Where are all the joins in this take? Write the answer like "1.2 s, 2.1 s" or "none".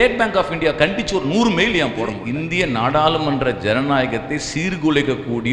2.2 s